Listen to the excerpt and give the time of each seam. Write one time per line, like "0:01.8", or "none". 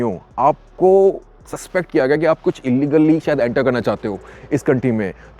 none